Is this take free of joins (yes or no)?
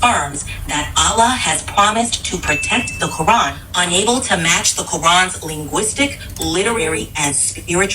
no